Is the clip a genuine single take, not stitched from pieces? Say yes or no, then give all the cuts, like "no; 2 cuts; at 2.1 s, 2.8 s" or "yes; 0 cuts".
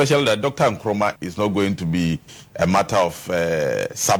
yes; 0 cuts